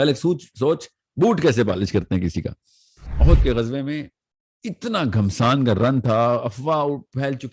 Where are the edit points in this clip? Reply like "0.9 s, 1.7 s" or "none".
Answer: 3.0 s